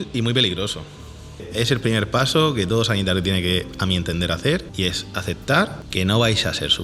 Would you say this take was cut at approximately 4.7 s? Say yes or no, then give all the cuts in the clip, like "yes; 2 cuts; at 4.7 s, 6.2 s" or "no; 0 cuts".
yes; 3 cuts; at 1.4 s, 4.7 s, 5.8 s